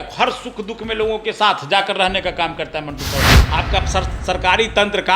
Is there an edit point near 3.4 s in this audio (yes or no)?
yes